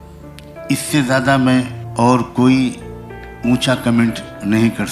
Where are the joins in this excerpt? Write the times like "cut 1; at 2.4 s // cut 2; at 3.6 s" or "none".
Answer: cut 1; at 0.7 s // cut 2; at 1.8 s